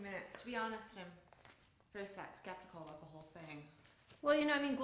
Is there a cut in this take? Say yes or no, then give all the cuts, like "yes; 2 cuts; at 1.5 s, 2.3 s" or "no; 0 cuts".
yes; 1 cut; at 2.9 s